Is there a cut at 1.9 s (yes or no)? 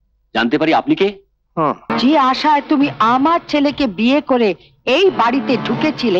yes